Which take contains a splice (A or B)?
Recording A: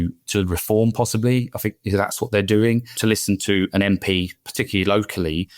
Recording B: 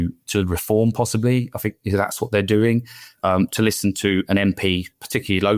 A